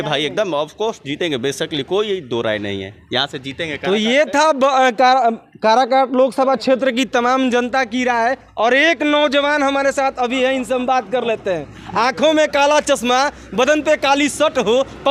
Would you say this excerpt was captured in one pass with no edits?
yes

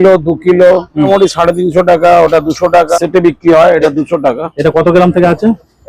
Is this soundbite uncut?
no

